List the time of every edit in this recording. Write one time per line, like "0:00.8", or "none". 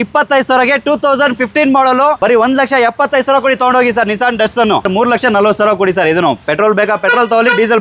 0:02.2
0:04.9